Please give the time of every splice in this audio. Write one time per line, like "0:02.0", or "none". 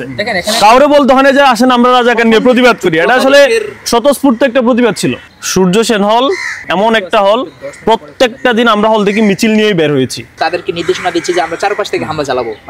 0:05.2
0:06.6
0:10.3